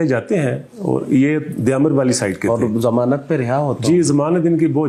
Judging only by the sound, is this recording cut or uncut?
uncut